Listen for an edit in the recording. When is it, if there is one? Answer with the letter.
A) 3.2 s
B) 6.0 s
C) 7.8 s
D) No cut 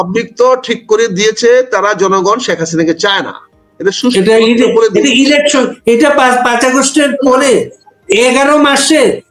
D